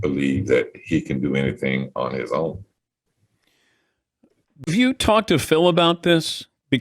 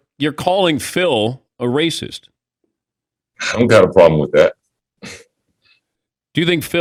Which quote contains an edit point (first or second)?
first